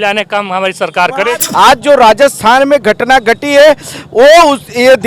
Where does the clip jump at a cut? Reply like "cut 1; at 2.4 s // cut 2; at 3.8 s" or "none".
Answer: cut 1; at 1.4 s